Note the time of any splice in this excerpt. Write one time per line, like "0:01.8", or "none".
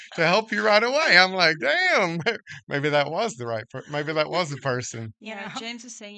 0:05.2